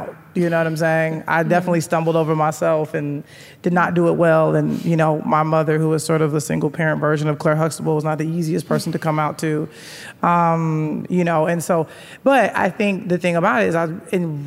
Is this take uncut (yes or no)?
yes